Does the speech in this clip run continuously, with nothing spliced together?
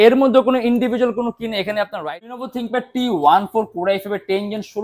no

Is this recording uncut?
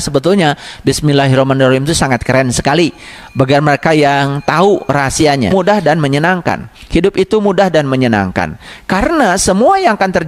no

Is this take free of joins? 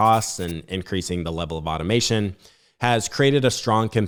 yes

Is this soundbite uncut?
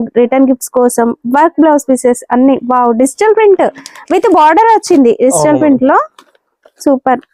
yes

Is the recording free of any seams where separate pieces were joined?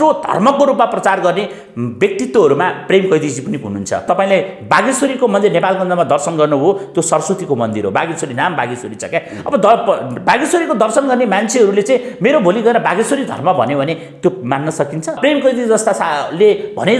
no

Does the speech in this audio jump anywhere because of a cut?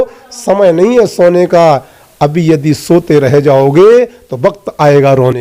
no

